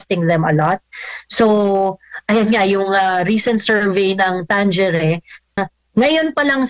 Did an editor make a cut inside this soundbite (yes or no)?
yes